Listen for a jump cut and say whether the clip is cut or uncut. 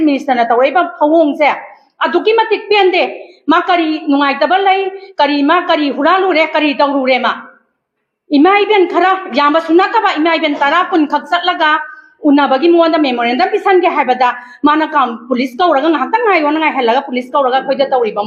uncut